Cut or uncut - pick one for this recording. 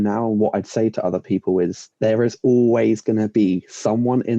cut